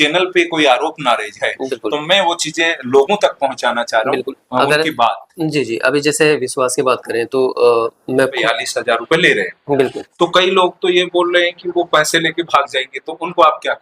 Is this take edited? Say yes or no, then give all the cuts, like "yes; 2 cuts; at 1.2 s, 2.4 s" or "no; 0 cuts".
yes; 1 cut; at 8.3 s